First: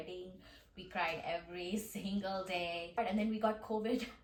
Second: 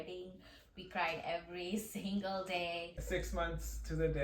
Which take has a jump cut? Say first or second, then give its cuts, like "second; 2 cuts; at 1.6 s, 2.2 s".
second; 1 cut; at 2.9 s